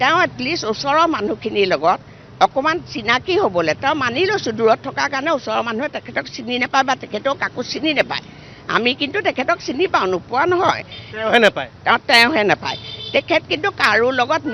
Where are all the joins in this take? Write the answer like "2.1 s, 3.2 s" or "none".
none

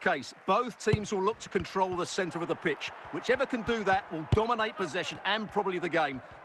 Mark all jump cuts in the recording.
none

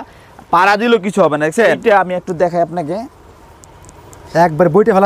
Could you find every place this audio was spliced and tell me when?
1.8 s

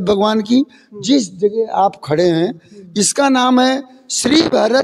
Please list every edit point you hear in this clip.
none

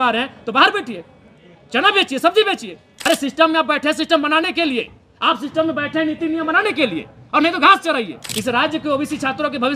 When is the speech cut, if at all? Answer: 2.9 s, 8.2 s

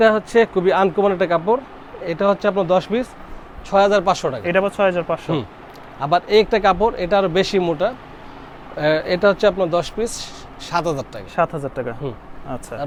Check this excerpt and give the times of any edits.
none

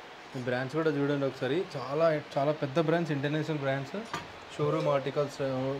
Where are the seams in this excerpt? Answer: none

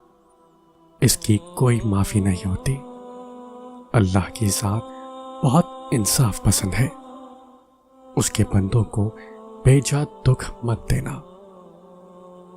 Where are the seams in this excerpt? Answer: 11.3 s

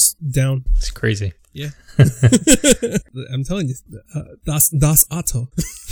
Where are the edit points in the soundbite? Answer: 3.1 s

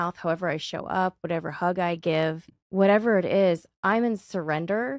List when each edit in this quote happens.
2.5 s

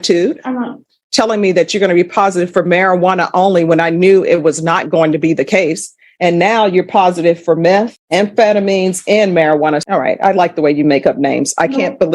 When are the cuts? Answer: 0.9 s, 9.8 s

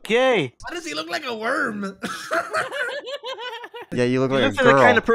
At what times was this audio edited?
3.9 s

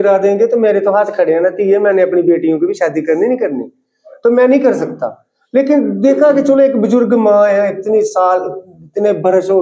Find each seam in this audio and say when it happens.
none

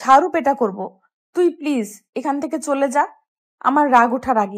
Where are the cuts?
none

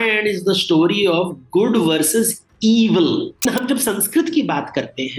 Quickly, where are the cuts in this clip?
3.4 s

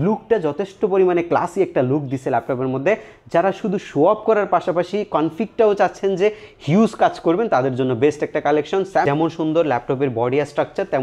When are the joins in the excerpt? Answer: 9.0 s

